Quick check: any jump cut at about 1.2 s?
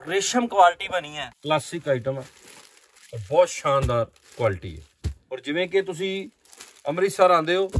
yes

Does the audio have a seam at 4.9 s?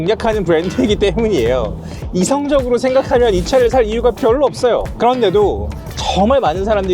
yes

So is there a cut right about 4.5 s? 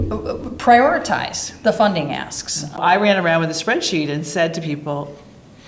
no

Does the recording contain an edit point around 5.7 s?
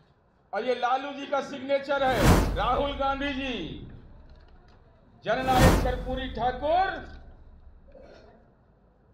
no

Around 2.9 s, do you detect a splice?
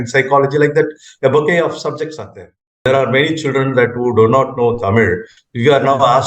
yes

